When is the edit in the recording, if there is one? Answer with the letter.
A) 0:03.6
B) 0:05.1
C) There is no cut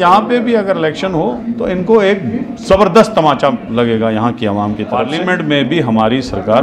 B